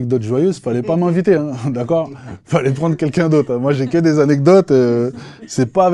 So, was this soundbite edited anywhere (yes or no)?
no